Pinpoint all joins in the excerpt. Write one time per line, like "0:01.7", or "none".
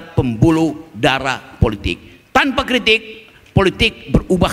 none